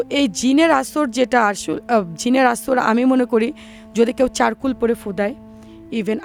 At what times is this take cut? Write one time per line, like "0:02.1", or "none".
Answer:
none